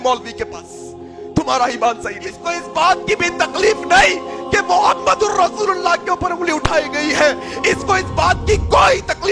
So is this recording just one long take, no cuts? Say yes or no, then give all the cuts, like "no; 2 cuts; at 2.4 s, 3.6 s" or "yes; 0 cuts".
no; 1 cut; at 2.5 s